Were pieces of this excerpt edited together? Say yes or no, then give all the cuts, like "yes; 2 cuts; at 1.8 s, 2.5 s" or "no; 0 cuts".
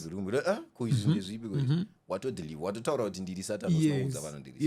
no; 0 cuts